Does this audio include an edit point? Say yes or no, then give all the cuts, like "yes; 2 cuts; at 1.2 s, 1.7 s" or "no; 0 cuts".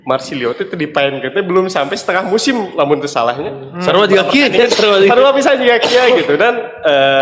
no; 0 cuts